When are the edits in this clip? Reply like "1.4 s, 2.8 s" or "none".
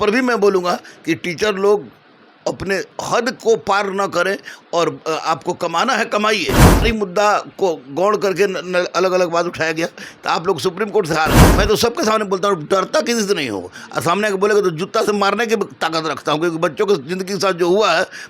6.8 s, 11.5 s

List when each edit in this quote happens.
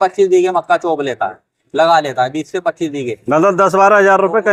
none

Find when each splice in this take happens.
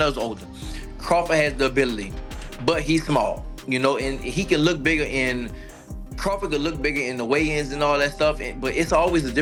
none

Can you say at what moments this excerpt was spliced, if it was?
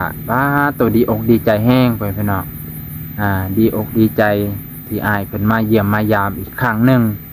none

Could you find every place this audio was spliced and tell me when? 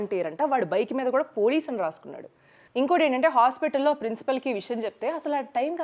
2.6 s

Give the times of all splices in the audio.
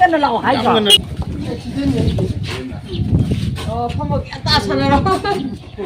1.0 s

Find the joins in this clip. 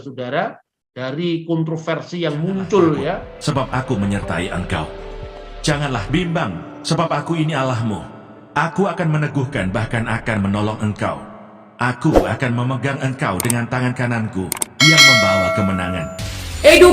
3.3 s

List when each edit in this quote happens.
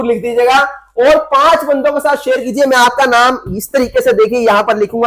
none

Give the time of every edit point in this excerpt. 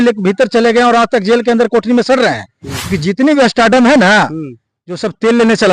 2.8 s

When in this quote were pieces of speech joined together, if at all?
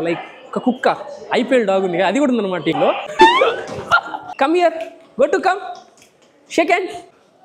3.0 s

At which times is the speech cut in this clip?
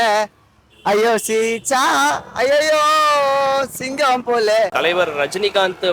4.7 s

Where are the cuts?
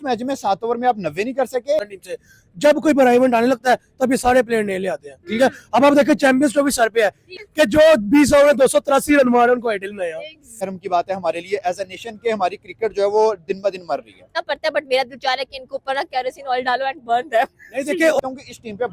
1.9 s, 7.3 s, 10.6 s, 14.3 s, 18.2 s

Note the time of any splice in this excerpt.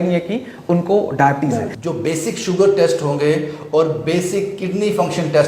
1.7 s

